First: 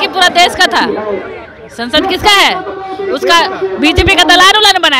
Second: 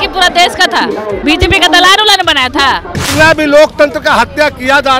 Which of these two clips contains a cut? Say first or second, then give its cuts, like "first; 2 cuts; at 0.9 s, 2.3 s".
second; 2 cuts; at 1.2 s, 3.0 s